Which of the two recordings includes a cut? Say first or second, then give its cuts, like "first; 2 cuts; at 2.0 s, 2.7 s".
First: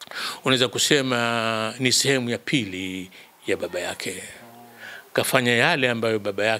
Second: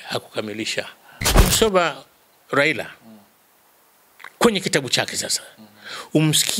second; 1 cut; at 1.4 s